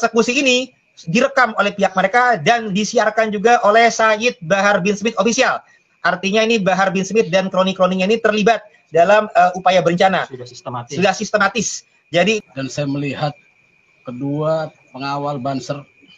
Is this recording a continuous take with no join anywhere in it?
no; 1 cut; at 12.4 s

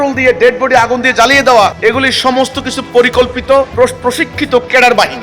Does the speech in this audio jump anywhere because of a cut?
yes; 2 cuts; at 1.8 s, 3.7 s

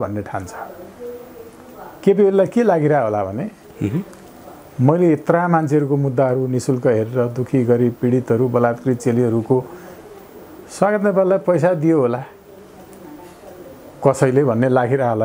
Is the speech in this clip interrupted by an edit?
no; 0 cuts

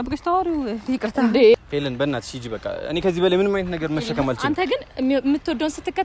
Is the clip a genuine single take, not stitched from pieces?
no; 1 cut; at 1.6 s

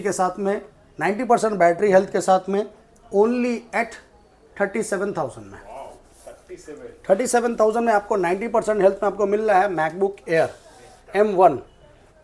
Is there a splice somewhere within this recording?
no; 0 cuts

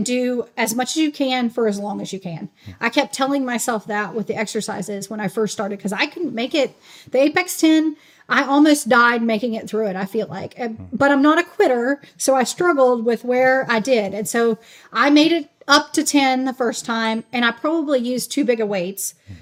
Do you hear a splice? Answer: no; 0 cuts

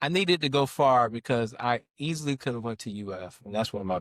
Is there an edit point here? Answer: no; 0 cuts

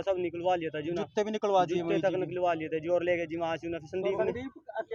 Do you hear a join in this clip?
no; 0 cuts

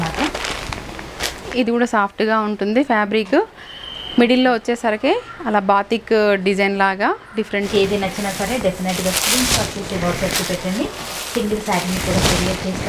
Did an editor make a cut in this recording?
yes; 2 cuts; at 1.5 s, 7.7 s

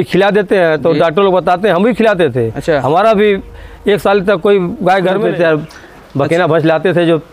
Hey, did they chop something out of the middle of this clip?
yes; 1 cut; at 5.2 s

